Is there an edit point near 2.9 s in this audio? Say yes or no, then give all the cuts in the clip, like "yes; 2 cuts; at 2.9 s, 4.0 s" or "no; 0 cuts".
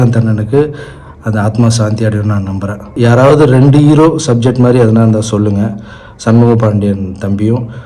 yes; 1 cut; at 2.9 s